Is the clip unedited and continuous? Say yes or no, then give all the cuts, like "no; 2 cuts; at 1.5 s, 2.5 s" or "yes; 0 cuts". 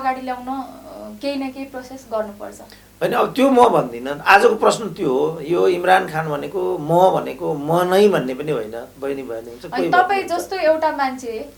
yes; 0 cuts